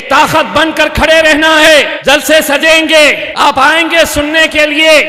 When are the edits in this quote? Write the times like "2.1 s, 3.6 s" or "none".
1.9 s, 3.2 s